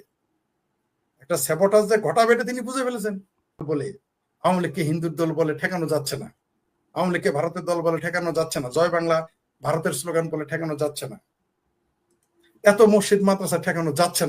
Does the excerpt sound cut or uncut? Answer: cut